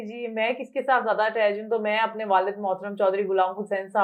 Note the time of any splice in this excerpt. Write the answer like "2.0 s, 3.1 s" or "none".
none